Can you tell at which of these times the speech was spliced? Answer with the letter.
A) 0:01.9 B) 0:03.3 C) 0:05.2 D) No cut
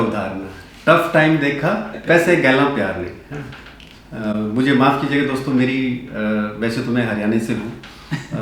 A